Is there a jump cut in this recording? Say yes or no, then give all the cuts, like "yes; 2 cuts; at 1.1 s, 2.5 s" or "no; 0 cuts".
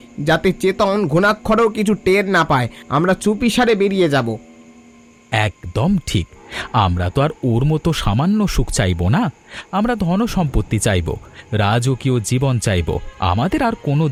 no; 0 cuts